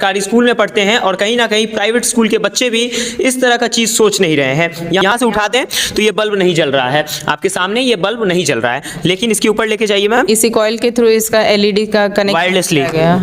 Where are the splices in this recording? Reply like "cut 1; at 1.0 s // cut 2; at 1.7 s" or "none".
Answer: cut 1; at 5.1 s // cut 2; at 10.2 s